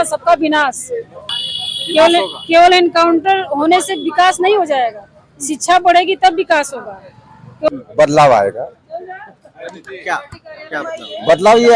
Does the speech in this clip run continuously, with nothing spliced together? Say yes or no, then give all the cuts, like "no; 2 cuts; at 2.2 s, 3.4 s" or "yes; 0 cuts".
no; 2 cuts; at 1.2 s, 7.7 s